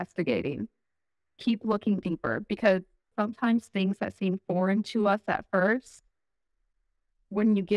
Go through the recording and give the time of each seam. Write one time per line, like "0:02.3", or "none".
0:03.1